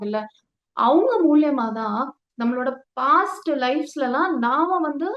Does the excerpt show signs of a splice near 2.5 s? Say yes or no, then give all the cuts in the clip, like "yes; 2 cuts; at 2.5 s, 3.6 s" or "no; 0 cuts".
no; 0 cuts